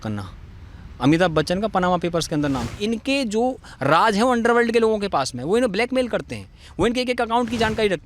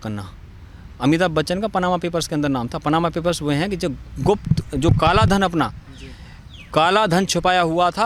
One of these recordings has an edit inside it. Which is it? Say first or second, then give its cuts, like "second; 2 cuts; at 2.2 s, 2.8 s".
first; 1 cut; at 2.7 s